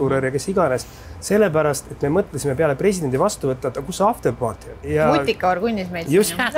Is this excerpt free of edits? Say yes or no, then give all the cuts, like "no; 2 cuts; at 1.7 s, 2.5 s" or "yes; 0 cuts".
no; 1 cut; at 4.8 s